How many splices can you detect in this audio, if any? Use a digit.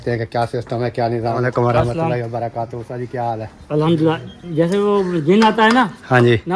1